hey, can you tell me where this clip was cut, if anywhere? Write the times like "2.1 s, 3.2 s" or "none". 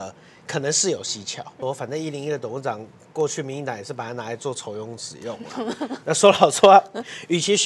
1.5 s